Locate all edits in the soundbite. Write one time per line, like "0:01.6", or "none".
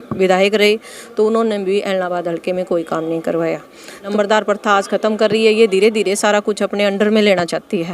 0:04.1